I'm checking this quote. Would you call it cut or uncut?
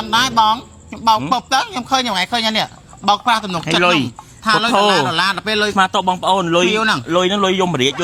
uncut